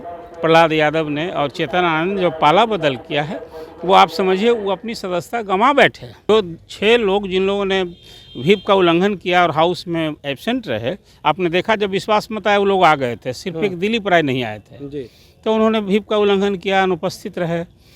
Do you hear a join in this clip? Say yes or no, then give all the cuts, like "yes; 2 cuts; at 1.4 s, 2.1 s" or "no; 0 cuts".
yes; 1 cut; at 6.3 s